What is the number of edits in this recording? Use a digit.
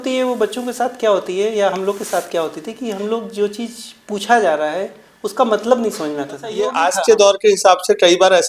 1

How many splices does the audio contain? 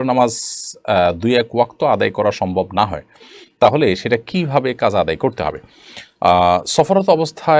0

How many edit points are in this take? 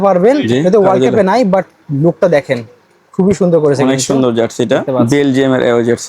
1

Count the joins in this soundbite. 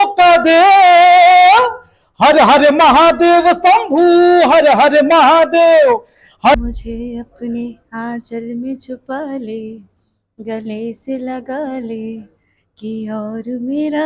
1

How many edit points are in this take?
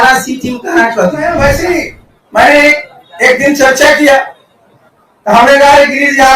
1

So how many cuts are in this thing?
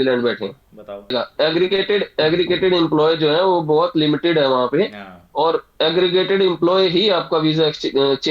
1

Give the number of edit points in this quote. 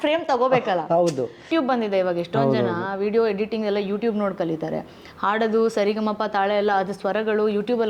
1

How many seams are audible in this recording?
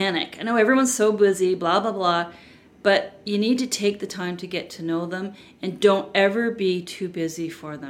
0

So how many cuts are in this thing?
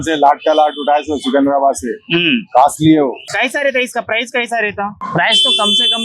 1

